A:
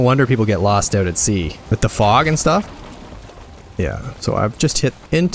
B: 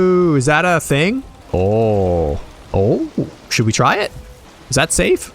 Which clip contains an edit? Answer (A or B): B